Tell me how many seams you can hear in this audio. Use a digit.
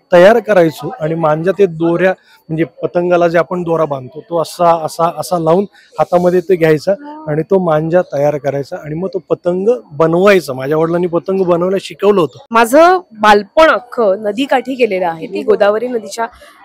1